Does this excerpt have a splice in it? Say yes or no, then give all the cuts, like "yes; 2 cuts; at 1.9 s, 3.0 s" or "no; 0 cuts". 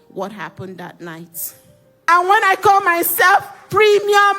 yes; 1 cut; at 2.1 s